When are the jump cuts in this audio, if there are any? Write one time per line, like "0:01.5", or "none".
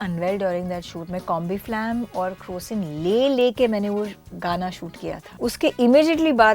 0:05.4